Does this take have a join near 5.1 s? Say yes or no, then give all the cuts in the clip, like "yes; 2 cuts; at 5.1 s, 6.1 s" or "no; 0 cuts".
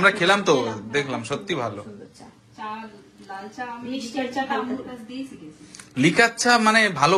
no; 0 cuts